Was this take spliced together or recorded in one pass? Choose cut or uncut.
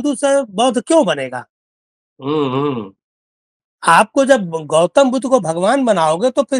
uncut